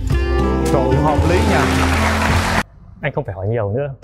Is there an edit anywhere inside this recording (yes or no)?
yes